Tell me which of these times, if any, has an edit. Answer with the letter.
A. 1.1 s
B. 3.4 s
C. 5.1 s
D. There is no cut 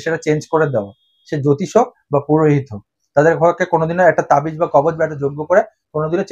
D